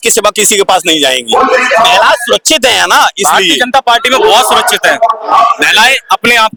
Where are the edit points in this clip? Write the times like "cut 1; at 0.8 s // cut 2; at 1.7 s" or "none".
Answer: none